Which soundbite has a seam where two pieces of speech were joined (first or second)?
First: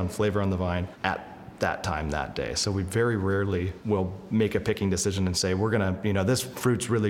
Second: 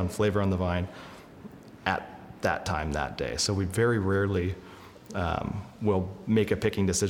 first